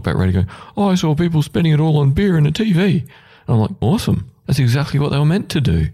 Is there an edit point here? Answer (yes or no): yes